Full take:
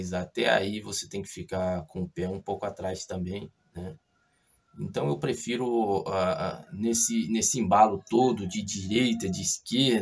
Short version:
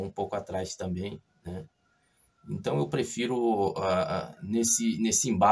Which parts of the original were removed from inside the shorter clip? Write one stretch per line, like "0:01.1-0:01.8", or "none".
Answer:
none